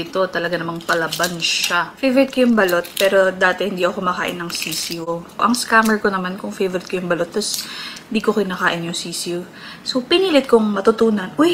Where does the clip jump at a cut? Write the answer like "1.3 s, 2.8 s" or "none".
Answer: 5.1 s